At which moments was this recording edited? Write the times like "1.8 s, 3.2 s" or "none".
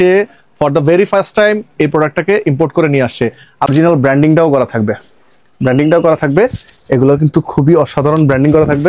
3.7 s